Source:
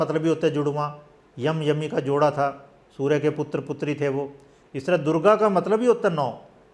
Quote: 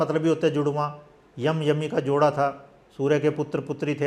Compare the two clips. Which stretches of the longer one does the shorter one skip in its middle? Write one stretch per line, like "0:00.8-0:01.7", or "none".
none